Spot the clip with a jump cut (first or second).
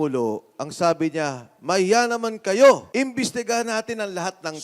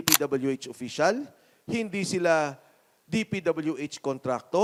first